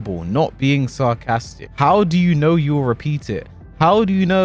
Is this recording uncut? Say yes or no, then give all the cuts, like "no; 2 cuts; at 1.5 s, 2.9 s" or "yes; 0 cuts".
no; 1 cut; at 1.6 s